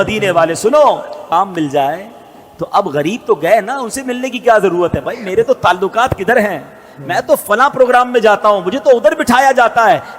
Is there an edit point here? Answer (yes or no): yes